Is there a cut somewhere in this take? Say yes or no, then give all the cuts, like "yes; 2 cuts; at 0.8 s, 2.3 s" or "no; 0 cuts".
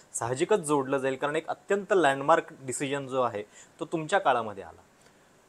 no; 0 cuts